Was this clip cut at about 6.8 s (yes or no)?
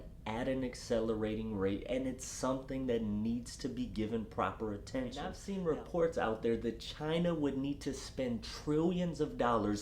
no